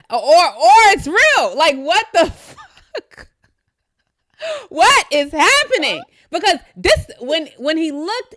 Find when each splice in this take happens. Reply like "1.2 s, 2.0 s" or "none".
none